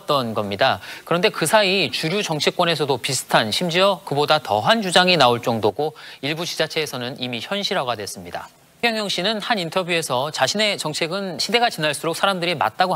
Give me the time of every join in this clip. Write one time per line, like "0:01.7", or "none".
0:08.8
0:11.4